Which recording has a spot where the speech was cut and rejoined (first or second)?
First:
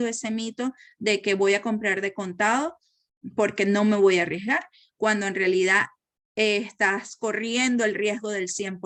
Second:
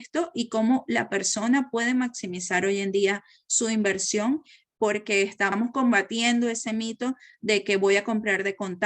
second